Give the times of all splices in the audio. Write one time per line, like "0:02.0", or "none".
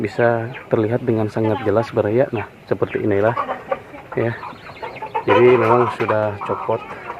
none